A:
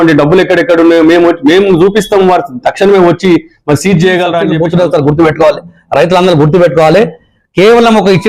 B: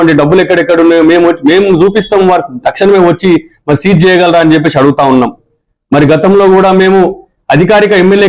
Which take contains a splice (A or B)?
A